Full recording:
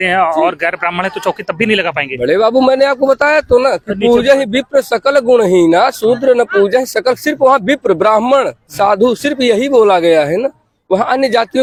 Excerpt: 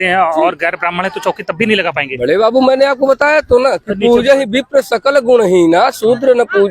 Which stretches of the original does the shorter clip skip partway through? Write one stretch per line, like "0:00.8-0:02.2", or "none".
none